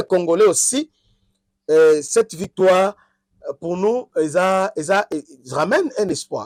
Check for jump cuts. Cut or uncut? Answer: uncut